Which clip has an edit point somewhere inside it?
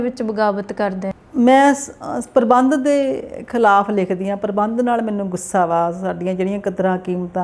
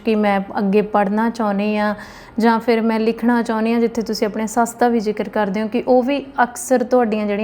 first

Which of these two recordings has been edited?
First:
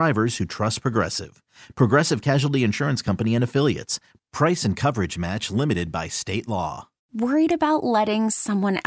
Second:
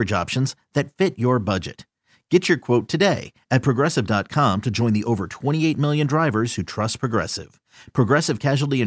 first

